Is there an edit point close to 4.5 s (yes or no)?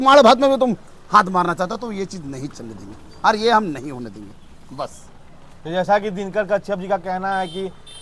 no